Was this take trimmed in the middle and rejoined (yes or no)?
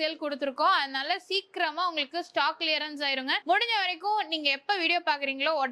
no